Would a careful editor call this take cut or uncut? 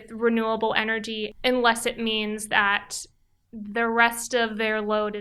cut